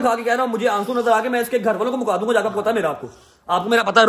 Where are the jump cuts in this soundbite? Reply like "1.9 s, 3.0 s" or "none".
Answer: none